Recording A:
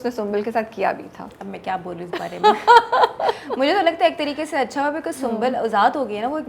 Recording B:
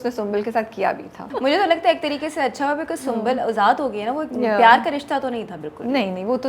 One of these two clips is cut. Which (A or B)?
B